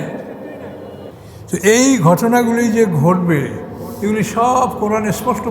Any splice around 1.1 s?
yes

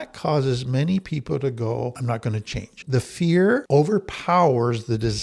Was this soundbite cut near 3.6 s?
yes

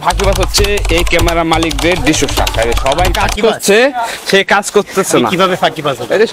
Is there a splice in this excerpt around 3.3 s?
no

